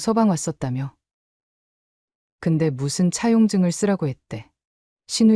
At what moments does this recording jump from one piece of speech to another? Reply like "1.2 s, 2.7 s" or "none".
none